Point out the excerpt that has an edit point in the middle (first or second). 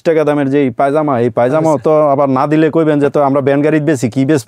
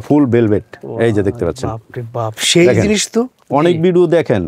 second